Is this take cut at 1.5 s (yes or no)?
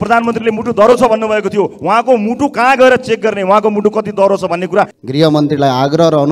no